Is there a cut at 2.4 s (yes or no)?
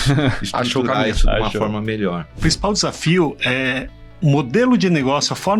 yes